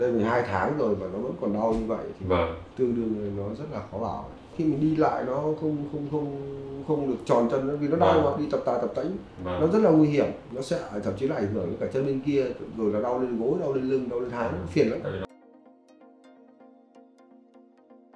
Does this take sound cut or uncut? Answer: cut